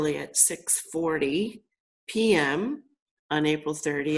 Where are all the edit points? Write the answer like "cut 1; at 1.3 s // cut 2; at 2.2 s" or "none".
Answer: none